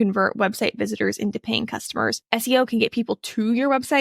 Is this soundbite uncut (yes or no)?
no